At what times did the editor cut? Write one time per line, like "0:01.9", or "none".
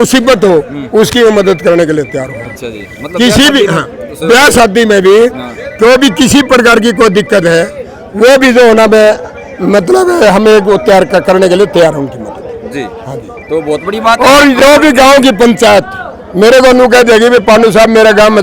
none